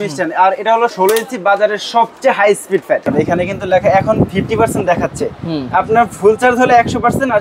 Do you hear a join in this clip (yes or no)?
yes